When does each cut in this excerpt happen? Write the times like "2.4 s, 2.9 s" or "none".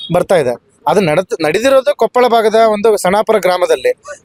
none